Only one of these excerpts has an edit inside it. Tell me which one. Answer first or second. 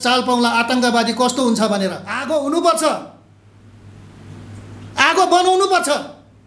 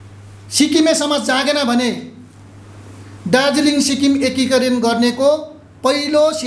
first